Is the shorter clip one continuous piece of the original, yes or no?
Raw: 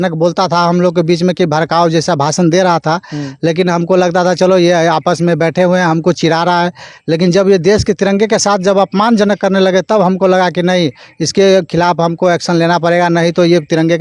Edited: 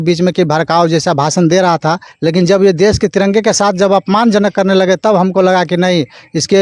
no